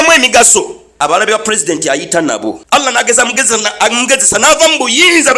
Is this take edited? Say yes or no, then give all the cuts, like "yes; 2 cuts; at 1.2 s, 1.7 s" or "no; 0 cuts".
yes; 2 cuts; at 0.9 s, 2.9 s